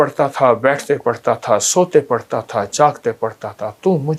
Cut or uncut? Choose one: uncut